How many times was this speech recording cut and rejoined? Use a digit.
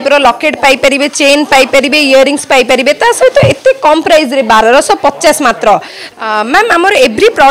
1